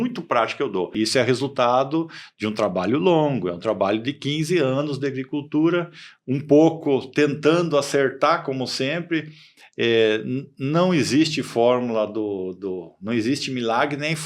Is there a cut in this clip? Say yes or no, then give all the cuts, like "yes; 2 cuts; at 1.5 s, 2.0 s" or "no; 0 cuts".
yes; 1 cut; at 0.9 s